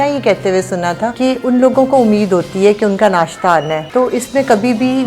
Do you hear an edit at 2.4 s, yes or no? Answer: no